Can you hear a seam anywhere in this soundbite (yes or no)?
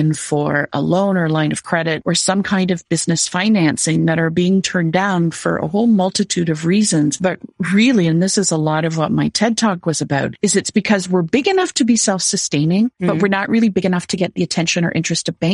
yes